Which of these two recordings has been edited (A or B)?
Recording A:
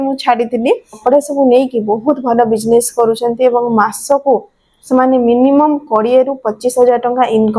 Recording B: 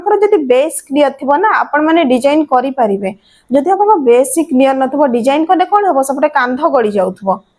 A